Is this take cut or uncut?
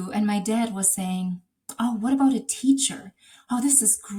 uncut